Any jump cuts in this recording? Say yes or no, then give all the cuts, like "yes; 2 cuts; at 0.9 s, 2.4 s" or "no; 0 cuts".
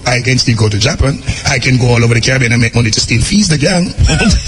no; 0 cuts